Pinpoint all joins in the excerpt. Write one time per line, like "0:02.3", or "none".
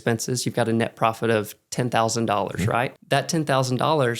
0:03.0